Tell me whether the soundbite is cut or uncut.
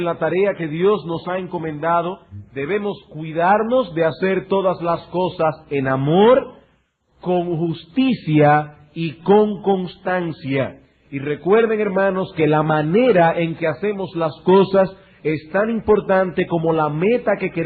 uncut